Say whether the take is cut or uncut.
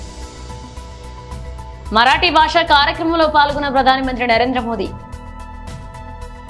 uncut